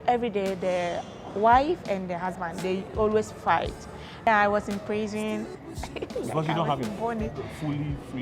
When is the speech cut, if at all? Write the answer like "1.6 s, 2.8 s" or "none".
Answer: 4.2 s